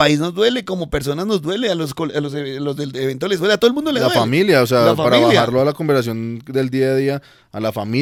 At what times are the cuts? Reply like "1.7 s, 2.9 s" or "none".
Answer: none

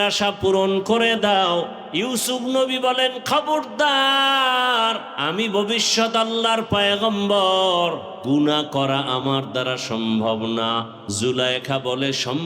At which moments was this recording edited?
1.8 s, 5.1 s, 8.1 s, 11.0 s

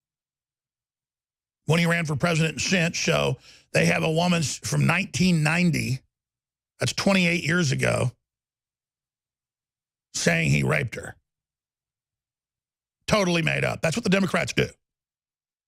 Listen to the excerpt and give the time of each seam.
none

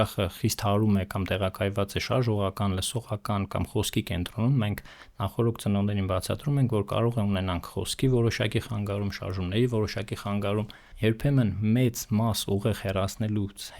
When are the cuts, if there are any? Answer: 10.8 s

